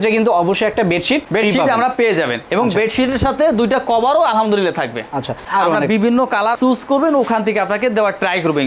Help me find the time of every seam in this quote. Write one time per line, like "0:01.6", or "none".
0:05.4
0:06.6